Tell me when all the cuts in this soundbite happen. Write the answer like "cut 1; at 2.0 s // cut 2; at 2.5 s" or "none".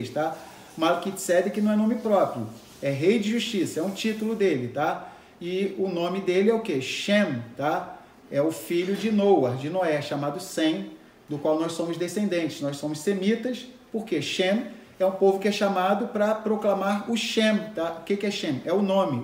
none